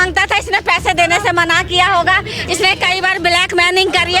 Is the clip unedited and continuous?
yes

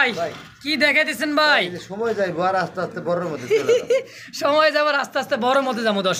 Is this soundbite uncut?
yes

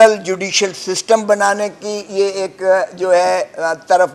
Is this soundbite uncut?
yes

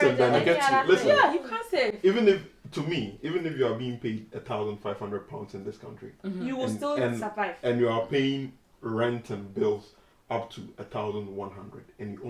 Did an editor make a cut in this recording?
no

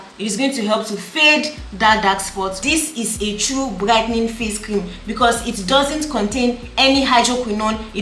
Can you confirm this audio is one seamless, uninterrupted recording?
no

